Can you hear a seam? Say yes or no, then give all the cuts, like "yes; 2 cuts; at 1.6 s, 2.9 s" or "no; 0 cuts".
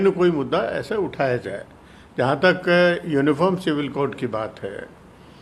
no; 0 cuts